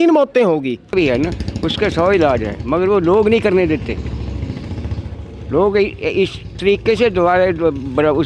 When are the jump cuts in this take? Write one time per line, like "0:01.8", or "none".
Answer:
0:00.9